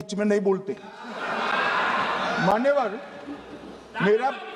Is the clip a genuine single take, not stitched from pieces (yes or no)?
yes